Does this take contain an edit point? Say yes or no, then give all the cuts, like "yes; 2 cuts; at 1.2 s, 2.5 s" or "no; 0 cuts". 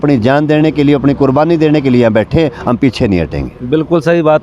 no; 0 cuts